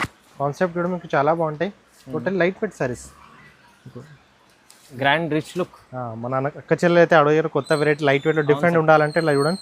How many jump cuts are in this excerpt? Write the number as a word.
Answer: one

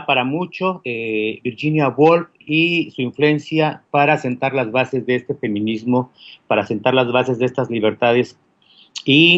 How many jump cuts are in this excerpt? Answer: one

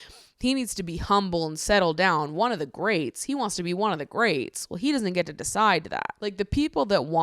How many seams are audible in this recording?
one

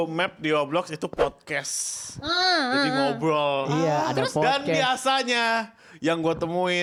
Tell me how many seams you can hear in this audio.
zero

